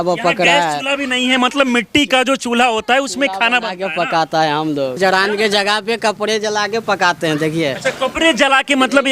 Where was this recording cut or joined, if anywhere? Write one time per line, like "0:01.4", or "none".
0:05.0